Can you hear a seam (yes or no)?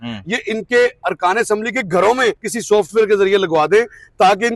yes